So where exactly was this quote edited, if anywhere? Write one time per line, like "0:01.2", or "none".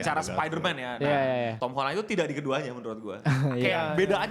0:01.5